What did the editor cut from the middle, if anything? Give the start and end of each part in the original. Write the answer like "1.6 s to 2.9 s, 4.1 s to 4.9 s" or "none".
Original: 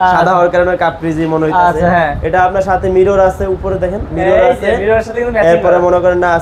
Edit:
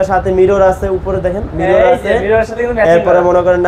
none